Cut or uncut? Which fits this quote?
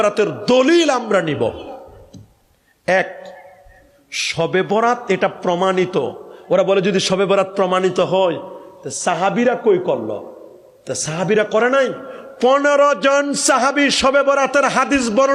uncut